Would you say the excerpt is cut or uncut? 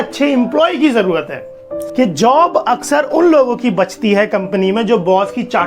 cut